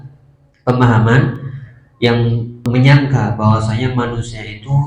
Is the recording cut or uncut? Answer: cut